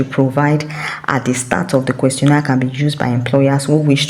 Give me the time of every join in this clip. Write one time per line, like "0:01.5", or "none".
none

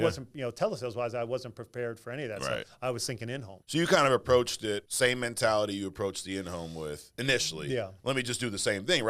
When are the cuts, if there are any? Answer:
0:03.5
0:04.9

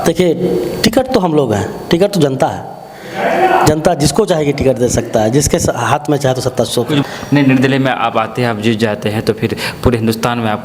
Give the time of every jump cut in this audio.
0:07.0

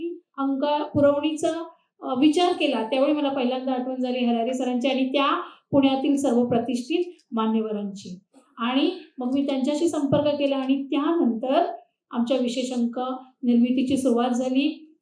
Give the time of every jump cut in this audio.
none

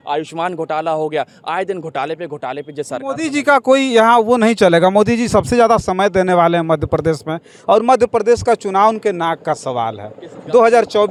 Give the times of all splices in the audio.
none

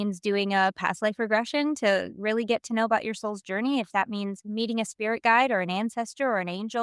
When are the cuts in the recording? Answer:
none

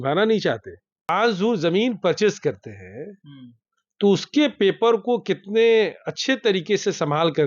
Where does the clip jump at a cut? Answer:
0:01.1

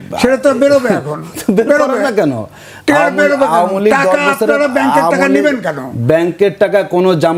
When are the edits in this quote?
none

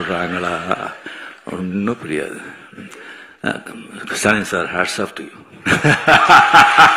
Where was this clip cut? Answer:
none

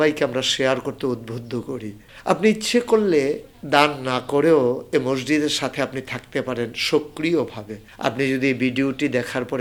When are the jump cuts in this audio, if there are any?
none

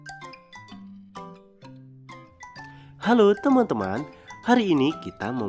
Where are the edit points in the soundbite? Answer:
none

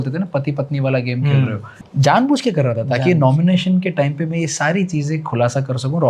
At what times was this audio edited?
0:01.8

